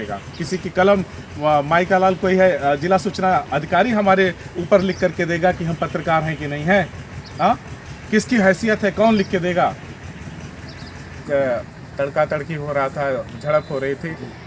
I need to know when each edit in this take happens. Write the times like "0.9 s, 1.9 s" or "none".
10.9 s